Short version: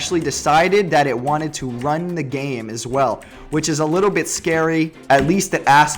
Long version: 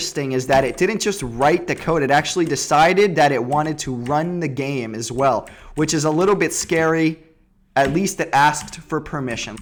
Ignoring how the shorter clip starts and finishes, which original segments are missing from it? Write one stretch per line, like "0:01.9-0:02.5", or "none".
0:07.2-0:07.6